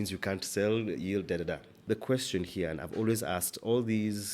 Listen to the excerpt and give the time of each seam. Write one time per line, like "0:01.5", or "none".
0:01.7